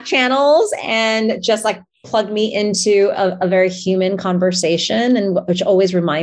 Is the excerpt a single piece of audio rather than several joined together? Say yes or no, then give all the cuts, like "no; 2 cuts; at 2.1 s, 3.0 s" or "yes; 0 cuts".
yes; 0 cuts